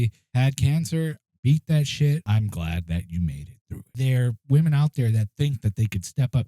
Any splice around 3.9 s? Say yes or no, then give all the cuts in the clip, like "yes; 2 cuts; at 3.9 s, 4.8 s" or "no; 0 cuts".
yes; 2 cuts; at 2.2 s, 3.9 s